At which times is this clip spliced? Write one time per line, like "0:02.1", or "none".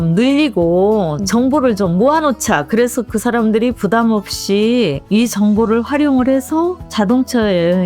0:05.0
0:06.8